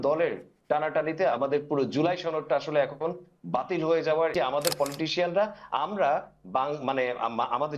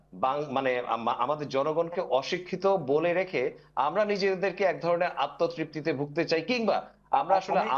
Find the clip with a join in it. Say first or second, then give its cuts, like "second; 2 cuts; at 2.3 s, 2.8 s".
first; 1 cut; at 4.3 s